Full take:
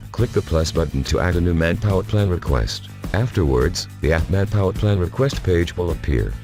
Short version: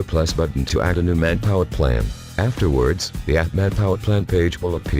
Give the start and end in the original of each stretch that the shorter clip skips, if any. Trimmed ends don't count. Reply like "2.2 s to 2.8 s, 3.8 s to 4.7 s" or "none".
2.1 s to 2.5 s, 5.0 s to 5.4 s